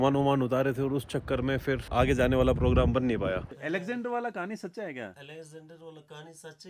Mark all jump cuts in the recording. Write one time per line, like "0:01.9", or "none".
0:03.4